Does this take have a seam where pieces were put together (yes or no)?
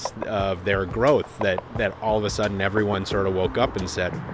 no